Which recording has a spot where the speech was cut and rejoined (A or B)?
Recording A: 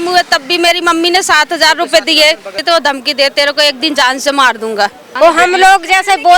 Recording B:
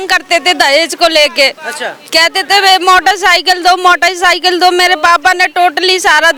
A